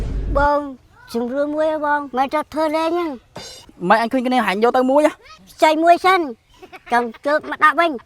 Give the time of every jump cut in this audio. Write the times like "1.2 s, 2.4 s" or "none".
2.1 s